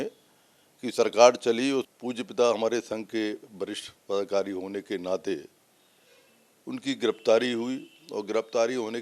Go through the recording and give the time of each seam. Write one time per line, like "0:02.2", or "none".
0:01.9